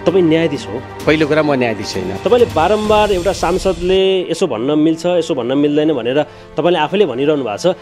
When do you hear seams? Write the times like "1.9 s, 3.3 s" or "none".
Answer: 1.0 s, 2.1 s